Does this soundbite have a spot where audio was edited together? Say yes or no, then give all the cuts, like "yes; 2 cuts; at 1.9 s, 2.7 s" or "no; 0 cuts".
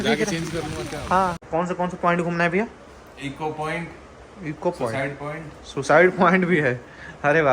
yes; 1 cut; at 1.4 s